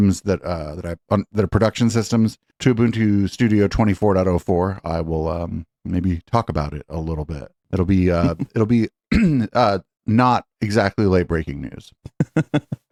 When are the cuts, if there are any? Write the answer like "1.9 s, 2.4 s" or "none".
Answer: none